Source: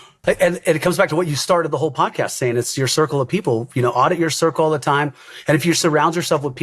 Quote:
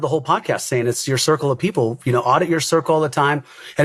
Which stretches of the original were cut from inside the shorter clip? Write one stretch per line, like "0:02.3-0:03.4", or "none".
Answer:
none